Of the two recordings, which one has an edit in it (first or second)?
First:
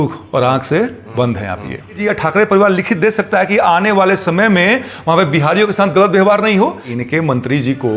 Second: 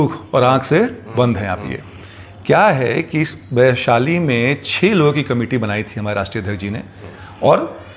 first